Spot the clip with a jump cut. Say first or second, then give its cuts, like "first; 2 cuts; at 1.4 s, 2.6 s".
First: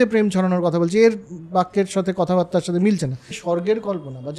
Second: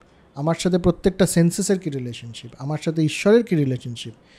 first; 1 cut; at 3.4 s